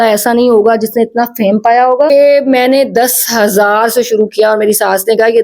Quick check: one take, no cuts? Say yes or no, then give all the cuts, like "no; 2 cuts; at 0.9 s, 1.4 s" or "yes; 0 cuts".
no; 1 cut; at 2.1 s